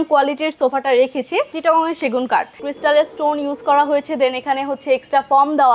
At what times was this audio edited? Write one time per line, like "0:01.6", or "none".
0:01.5
0:02.6